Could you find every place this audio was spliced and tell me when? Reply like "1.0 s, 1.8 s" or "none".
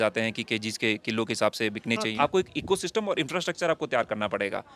2.1 s